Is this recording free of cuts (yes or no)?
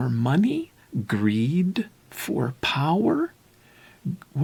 yes